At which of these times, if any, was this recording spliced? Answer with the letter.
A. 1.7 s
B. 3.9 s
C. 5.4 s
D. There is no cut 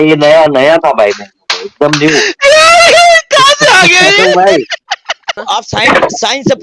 C